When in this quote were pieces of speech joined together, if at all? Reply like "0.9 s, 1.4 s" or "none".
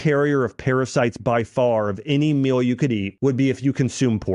3.1 s

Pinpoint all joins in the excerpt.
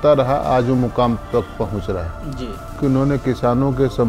2.7 s

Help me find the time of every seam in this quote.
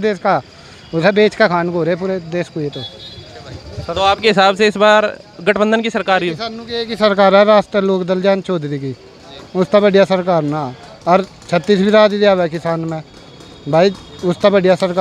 none

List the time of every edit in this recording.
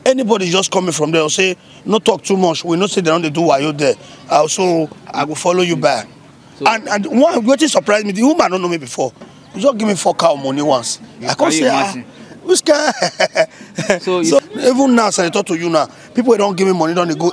14.4 s

